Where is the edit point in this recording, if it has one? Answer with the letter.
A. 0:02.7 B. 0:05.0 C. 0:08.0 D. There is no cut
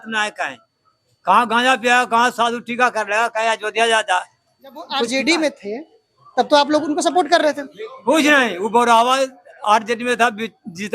B